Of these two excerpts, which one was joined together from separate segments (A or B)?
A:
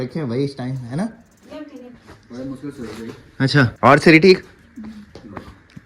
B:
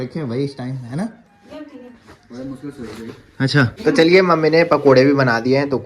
B